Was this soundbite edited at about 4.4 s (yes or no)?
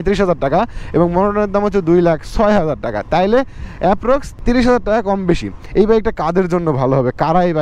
yes